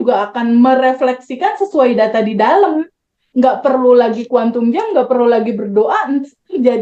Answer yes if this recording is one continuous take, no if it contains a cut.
yes